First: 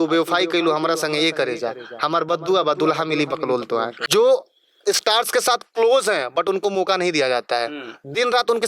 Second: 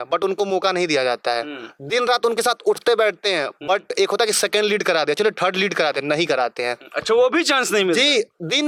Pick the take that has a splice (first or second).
first